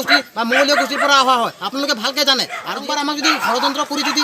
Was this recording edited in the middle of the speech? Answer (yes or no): yes